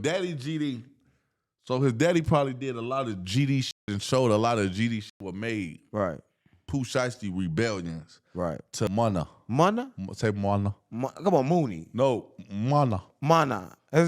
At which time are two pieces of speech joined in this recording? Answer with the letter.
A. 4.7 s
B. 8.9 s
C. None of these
B